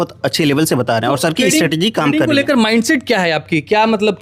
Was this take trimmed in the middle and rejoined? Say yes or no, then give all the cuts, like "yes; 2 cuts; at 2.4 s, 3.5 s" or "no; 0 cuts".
no; 0 cuts